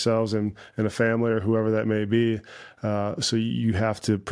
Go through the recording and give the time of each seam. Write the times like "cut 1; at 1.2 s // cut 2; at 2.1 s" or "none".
none